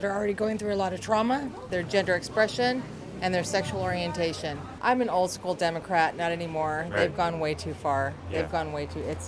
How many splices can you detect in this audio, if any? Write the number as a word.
two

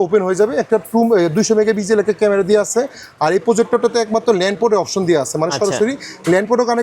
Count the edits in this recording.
zero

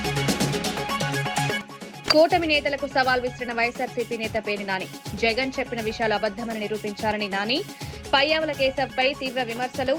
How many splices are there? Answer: one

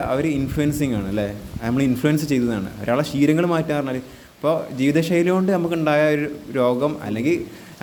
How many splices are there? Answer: zero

